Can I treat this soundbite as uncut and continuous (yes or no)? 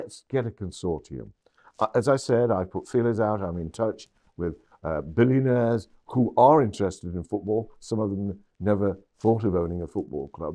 yes